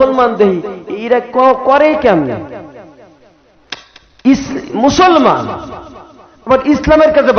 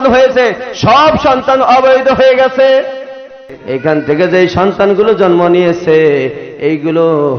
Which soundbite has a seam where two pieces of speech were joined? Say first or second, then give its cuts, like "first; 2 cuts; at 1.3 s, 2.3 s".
second; 1 cut; at 3.5 s